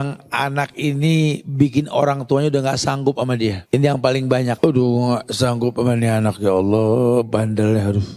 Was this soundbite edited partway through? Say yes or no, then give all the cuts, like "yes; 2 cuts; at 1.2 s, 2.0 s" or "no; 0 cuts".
yes; 2 cuts; at 3.6 s, 4.6 s